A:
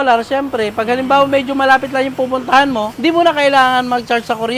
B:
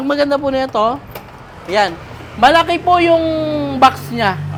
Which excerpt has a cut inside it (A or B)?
A